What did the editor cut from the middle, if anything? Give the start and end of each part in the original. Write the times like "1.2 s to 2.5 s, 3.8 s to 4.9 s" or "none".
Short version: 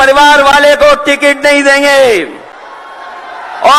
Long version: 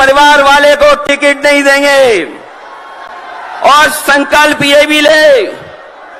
none